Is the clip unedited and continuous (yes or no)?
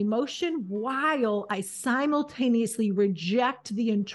yes